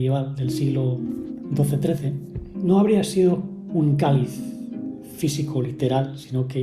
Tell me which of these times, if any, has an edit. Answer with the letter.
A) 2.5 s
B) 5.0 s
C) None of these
A